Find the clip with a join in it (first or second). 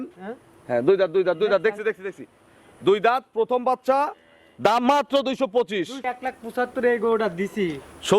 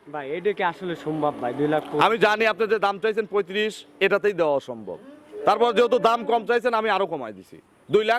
first